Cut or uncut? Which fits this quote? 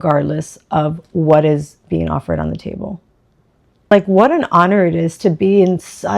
cut